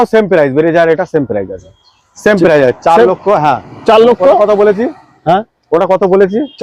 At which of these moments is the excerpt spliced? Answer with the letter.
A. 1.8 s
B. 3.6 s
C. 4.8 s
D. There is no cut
D